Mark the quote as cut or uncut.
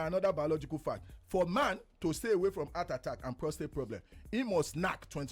uncut